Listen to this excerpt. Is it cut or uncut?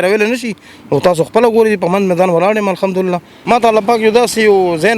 cut